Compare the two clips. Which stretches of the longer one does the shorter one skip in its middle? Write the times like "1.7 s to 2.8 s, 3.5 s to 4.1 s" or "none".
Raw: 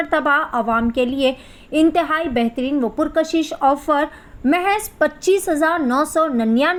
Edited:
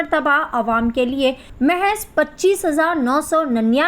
1.5 s to 4.3 s